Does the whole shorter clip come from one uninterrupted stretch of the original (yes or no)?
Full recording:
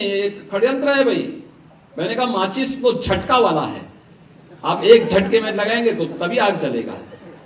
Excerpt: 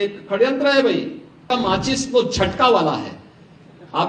no